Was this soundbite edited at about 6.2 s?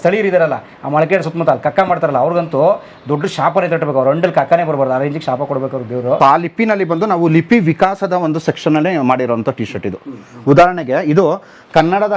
yes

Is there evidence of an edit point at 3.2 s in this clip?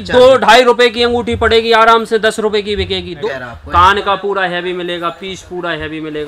yes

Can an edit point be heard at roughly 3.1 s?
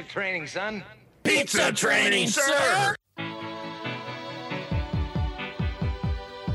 yes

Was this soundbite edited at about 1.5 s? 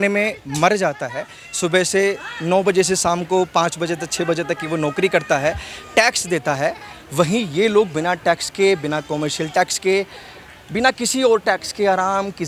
no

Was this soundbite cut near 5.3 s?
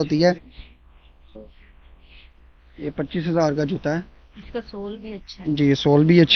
no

